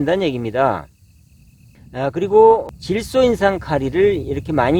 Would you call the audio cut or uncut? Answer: uncut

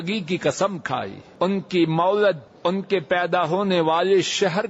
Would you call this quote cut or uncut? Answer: cut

